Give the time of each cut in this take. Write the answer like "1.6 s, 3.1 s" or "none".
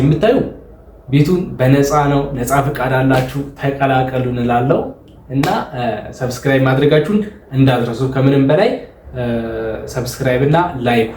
none